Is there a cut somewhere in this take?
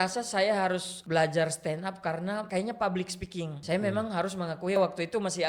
yes; 4 cuts; at 0.9 s, 2.5 s, 3.6 s, 4.8 s

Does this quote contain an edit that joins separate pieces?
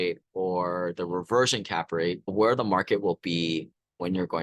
yes; 1 cut; at 2.2 s

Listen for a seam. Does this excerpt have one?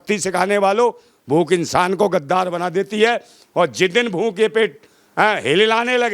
no; 0 cuts

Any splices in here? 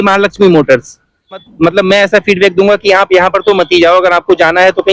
yes; 1 cut; at 1.5 s

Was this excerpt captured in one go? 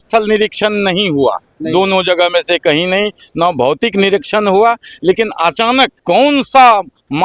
no; 1 cut; at 6.0 s

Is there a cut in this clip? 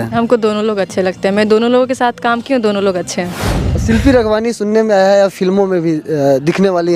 yes; 1 cut; at 3.8 s

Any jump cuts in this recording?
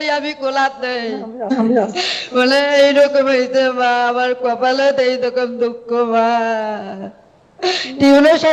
no; 0 cuts

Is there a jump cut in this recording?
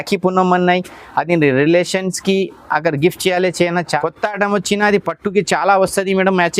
yes; 1 cut; at 4.0 s

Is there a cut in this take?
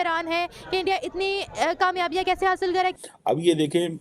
yes; 1 cut; at 2.9 s

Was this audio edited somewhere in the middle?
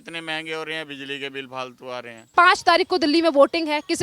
yes; 1 cut; at 2.3 s

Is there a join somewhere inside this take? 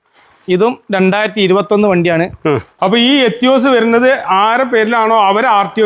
yes; 1 cut; at 2.7 s

